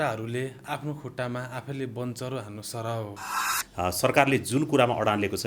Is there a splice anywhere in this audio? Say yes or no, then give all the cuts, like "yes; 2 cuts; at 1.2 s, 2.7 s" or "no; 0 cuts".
yes; 1 cut; at 3.6 s